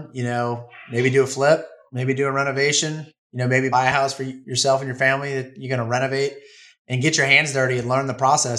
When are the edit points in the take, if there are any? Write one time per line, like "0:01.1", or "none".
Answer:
0:03.7